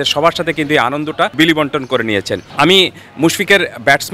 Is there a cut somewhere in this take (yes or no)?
yes